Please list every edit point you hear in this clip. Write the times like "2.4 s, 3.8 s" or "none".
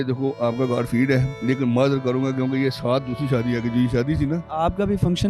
1.3 s, 4.5 s